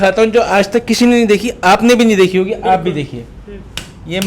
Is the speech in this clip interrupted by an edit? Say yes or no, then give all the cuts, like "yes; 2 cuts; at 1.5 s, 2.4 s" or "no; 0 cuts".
no; 0 cuts